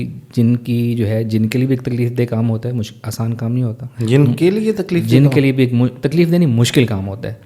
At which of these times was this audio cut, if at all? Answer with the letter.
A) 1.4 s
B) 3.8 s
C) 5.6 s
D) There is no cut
D